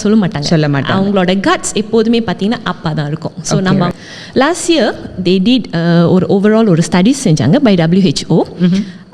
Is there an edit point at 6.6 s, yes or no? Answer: no